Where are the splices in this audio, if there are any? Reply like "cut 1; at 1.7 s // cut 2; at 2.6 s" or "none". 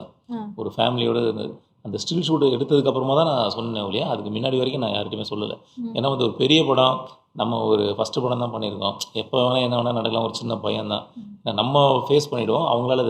none